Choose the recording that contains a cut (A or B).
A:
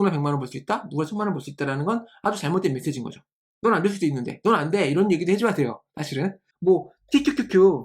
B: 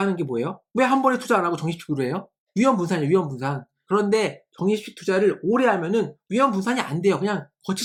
A